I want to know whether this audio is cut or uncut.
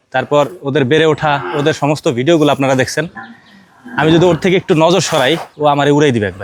uncut